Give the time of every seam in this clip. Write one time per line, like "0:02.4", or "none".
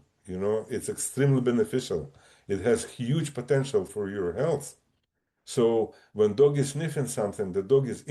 0:03.9